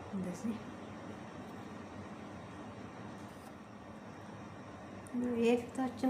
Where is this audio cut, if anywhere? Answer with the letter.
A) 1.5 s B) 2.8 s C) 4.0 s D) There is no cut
C